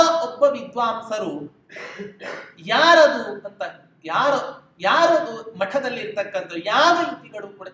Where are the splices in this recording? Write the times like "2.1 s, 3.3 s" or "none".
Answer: none